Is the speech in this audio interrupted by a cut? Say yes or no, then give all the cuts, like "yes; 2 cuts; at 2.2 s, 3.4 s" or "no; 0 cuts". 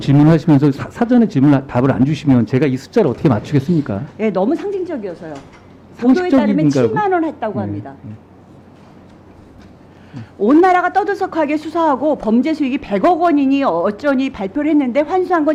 no; 0 cuts